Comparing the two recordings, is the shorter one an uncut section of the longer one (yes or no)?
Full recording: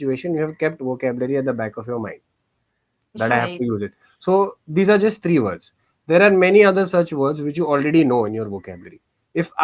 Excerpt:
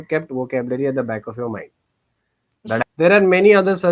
no